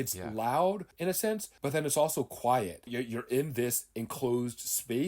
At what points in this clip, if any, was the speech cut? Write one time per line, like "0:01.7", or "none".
0:01.2
0:02.9